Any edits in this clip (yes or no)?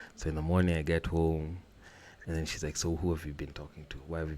no